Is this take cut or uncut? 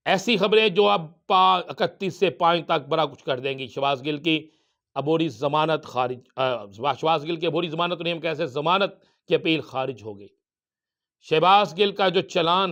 uncut